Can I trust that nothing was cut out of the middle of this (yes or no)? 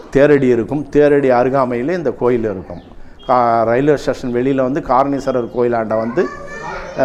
yes